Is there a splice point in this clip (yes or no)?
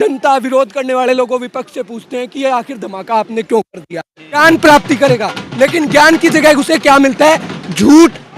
yes